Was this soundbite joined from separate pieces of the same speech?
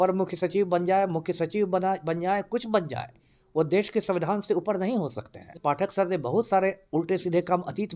yes; 1 cut; at 5.5 s

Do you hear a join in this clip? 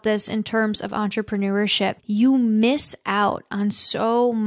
yes; 1 cut; at 2.0 s

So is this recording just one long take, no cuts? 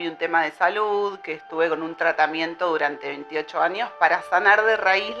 yes; 0 cuts

